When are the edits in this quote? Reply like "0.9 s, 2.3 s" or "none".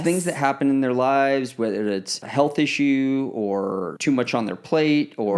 2.2 s, 3.9 s